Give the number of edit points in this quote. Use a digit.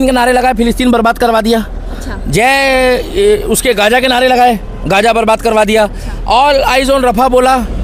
0